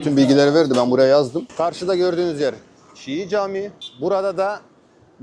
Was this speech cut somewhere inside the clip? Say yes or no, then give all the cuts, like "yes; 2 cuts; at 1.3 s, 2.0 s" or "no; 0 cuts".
yes; 2 cuts; at 1.4 s, 3.8 s